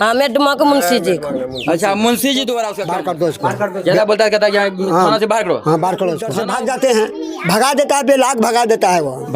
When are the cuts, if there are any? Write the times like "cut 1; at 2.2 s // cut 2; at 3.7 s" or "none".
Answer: cut 1; at 2.8 s // cut 2; at 6.3 s